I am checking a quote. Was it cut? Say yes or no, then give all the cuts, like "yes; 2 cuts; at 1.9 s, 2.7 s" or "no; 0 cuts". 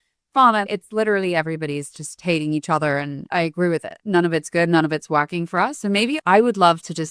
no; 0 cuts